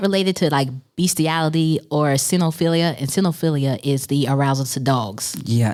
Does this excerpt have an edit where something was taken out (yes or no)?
no